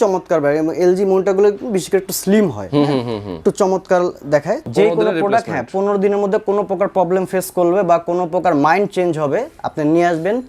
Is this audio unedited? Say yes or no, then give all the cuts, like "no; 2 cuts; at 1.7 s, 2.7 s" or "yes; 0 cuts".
no; 1 cut; at 4.6 s